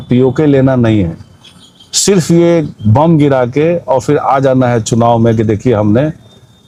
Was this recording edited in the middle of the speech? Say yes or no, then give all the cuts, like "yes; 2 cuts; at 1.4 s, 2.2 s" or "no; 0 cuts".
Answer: no; 0 cuts